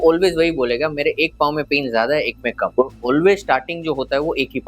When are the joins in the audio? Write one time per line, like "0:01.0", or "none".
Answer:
0:02.7